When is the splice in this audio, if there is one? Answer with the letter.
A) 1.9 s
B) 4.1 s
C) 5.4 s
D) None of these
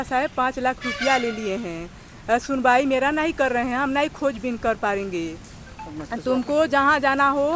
D